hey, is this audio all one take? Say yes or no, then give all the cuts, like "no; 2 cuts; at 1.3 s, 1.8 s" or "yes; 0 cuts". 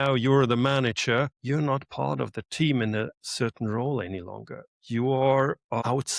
yes; 0 cuts